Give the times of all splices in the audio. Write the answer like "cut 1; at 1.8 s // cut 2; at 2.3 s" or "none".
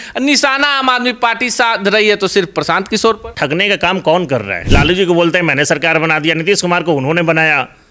cut 1; at 3.3 s // cut 2; at 4.6 s